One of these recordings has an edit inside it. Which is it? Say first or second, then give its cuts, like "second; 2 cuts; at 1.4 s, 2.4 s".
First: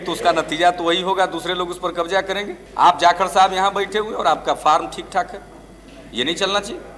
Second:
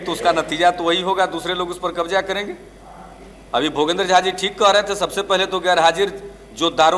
first; 1 cut; at 2.6 s